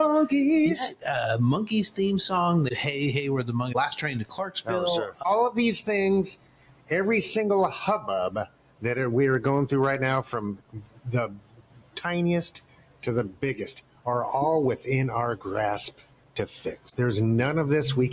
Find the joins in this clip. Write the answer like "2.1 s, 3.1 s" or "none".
2.7 s, 3.7 s, 5.2 s, 16.8 s